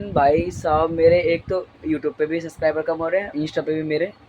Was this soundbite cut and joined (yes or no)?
yes